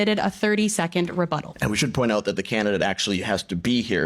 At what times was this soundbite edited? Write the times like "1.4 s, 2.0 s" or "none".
1.5 s